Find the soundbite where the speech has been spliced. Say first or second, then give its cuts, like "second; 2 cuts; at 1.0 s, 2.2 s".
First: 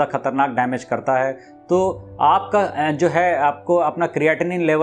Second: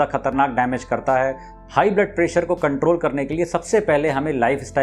second; 1 cut; at 1.5 s